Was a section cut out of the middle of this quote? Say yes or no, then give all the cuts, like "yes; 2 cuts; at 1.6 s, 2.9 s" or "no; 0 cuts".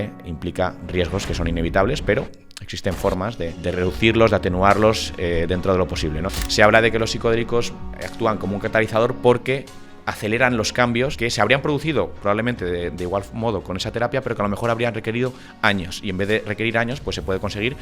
yes; 3 cuts; at 3.6 s, 6.3 s, 11.2 s